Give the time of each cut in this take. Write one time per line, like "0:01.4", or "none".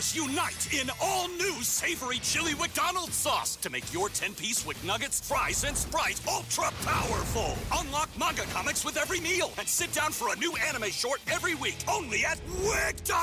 none

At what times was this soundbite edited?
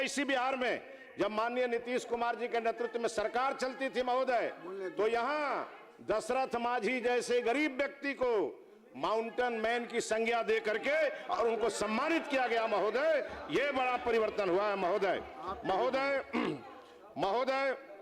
none

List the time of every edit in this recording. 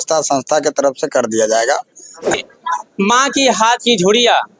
0:02.3

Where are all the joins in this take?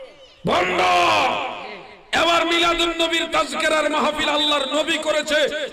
none

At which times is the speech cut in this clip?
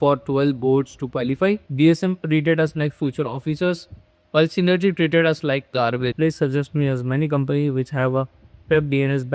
0:01.7
0:06.1

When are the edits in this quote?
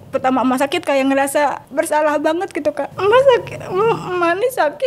0:01.6
0:02.9

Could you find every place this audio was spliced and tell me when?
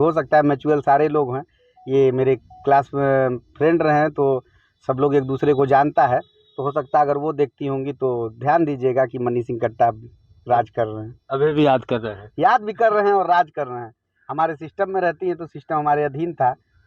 none

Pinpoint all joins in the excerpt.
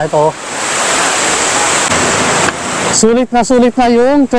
0:01.9

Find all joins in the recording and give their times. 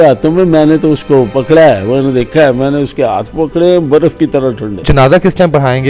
0:01.3
0:04.8

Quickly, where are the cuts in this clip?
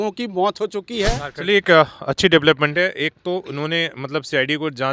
0:01.2

